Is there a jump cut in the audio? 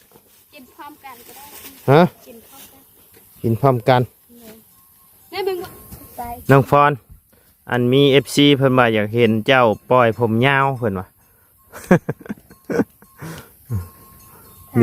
yes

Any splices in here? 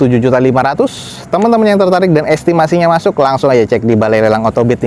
no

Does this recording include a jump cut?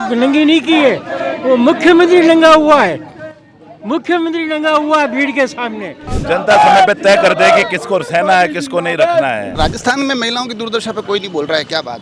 yes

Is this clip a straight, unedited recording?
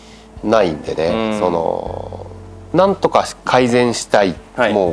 yes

